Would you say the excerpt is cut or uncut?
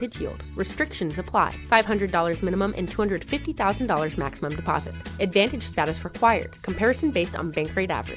uncut